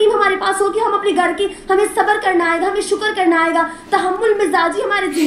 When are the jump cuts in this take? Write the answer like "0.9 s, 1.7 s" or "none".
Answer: none